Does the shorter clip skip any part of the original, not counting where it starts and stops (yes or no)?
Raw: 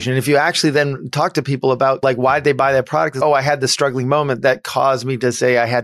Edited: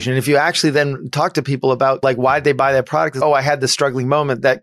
no